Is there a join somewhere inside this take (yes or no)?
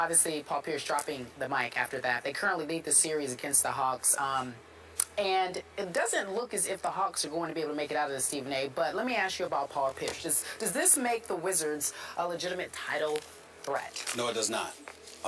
yes